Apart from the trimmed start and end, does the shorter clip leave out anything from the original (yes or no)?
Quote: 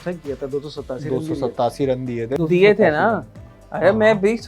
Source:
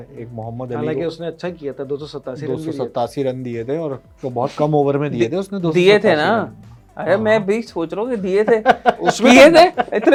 yes